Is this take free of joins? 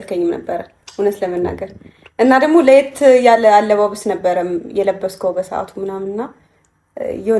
yes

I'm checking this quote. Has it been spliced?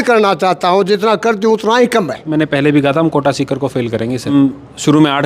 yes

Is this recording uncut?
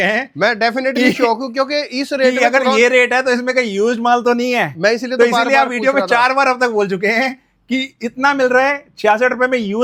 yes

